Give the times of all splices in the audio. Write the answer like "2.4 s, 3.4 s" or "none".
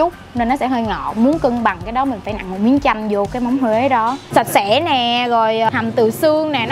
4.2 s, 5.7 s